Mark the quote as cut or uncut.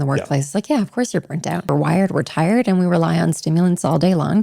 cut